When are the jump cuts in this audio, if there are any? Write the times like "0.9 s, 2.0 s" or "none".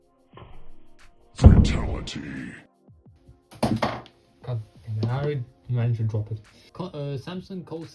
6.6 s

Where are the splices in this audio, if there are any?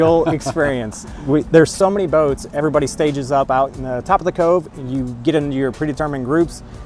none

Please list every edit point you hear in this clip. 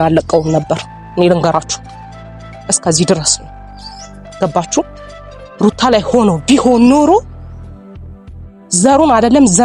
7.3 s, 8.7 s

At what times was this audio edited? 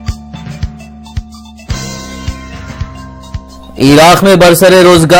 3.2 s

